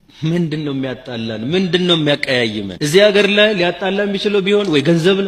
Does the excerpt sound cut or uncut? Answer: uncut